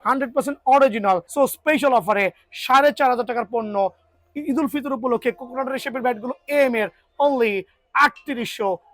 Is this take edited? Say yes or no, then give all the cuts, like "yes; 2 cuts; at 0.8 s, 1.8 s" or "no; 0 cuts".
yes; 1 cut; at 1.3 s